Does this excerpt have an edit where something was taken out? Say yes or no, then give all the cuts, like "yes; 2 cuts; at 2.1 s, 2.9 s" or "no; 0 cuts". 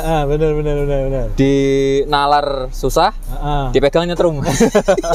no; 0 cuts